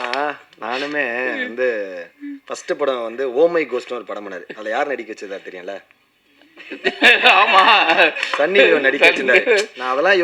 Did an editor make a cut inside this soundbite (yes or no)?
no